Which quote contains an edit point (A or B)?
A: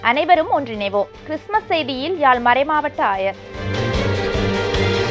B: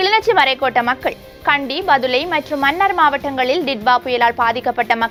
A